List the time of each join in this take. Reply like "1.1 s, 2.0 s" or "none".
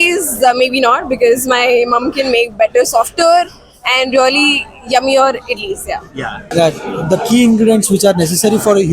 6.5 s